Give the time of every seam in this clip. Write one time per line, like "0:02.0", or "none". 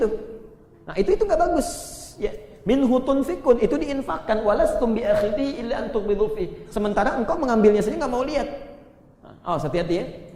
none

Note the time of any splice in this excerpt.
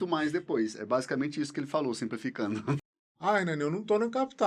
0:02.8

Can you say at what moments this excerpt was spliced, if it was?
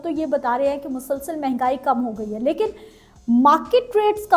none

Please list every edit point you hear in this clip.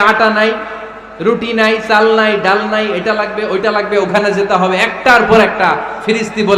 none

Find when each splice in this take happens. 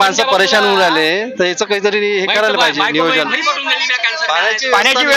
none

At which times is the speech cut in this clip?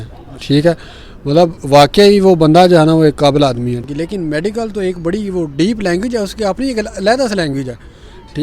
0:03.8

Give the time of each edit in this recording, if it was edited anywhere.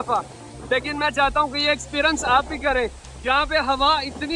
0:03.1

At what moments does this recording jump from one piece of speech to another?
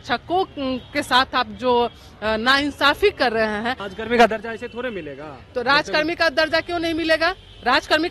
0:03.9

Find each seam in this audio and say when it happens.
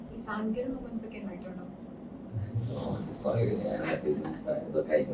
none

